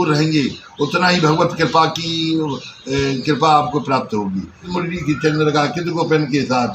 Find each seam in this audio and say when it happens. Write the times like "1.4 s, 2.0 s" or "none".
4.7 s